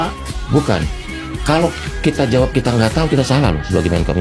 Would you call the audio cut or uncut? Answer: uncut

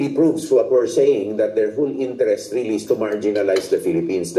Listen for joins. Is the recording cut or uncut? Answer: uncut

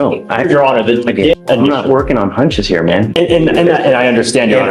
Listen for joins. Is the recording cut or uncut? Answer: cut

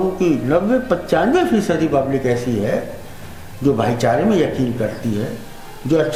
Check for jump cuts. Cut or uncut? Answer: uncut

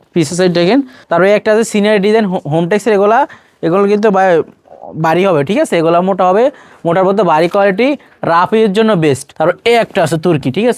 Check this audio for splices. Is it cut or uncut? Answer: cut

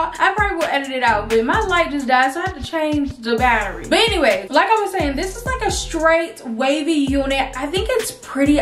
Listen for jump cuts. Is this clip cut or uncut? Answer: uncut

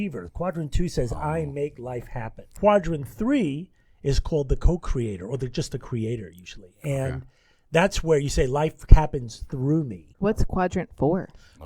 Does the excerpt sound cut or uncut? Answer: cut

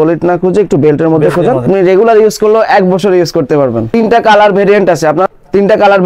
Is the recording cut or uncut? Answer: cut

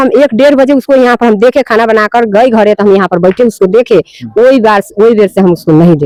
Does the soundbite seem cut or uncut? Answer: uncut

